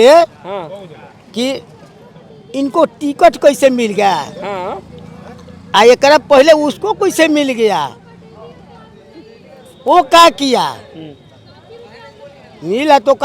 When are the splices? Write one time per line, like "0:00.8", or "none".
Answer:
none